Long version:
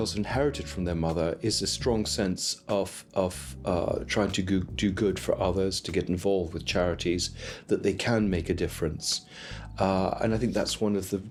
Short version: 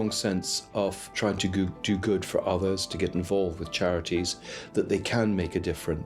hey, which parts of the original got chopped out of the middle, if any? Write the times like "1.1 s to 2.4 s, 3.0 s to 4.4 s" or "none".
3.0 s to 4.0 s